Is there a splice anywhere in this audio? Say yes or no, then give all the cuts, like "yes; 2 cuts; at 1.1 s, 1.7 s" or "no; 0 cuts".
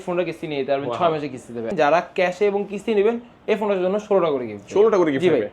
yes; 1 cut; at 1.7 s